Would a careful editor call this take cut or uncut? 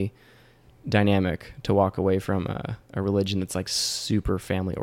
uncut